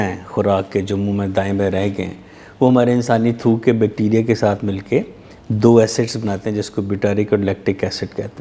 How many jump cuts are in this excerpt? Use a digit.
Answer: 0